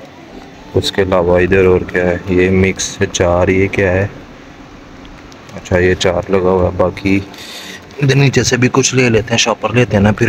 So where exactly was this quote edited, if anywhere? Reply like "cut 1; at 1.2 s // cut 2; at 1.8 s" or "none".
none